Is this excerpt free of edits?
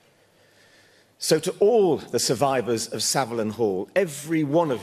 yes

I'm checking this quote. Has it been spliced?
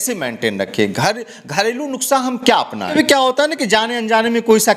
yes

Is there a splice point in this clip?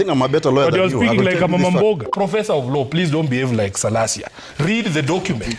yes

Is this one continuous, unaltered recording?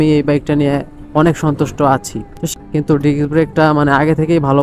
no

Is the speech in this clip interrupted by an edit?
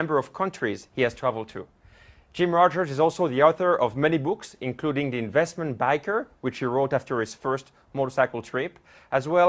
yes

